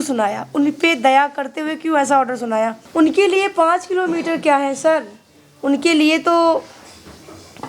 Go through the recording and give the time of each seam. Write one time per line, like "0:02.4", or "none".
0:02.8